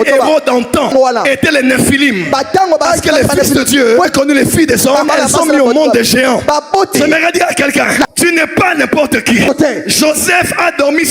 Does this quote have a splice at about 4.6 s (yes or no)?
no